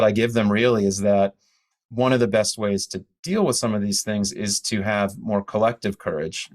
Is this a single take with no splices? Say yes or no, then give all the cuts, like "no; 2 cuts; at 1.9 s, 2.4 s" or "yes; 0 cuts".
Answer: yes; 0 cuts